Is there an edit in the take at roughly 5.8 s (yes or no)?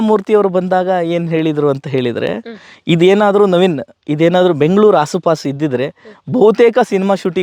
no